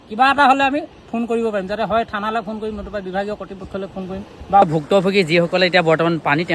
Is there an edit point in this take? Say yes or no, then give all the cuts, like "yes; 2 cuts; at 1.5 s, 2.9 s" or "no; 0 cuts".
no; 0 cuts